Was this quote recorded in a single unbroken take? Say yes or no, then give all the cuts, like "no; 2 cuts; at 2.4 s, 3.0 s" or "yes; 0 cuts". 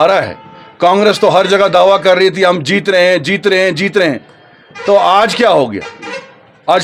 yes; 0 cuts